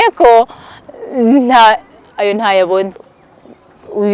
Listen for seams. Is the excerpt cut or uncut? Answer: cut